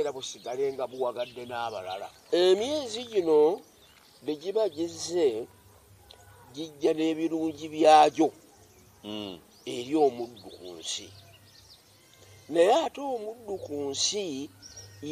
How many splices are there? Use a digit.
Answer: 1